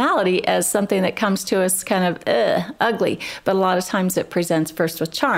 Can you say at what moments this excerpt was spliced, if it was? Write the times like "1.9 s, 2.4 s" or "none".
none